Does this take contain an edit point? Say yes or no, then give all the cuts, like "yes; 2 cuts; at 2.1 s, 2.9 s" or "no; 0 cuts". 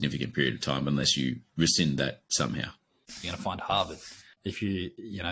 yes; 2 cuts; at 3.2 s, 4.3 s